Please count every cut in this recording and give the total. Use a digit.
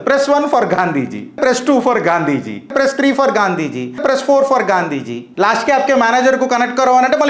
4